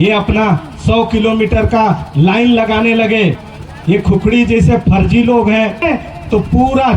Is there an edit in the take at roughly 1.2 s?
no; 2 cuts; at 3.5 s, 5.8 s

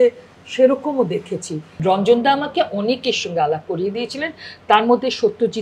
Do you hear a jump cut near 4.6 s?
no; 1 cut; at 1.7 s

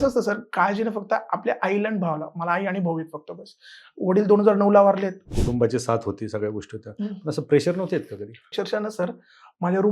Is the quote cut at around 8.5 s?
yes; 2 cuts; at 5.3 s, 8.5 s

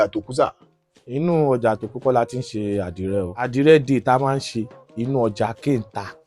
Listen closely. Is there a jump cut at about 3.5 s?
yes; 1 cut; at 3.5 s

